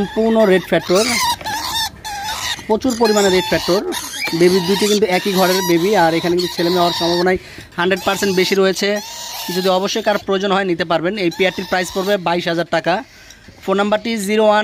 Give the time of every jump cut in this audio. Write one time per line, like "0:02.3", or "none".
none